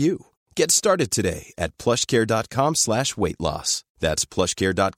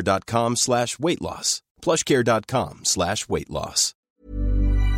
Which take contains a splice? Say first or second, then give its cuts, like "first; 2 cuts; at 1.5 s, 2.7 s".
second; 1 cut; at 3.9 s